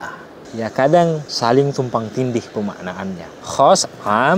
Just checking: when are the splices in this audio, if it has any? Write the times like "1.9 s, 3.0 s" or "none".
3.3 s